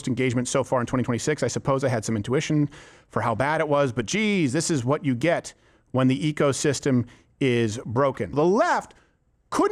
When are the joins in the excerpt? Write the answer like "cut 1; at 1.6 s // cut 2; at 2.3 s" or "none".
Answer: cut 1; at 8.3 s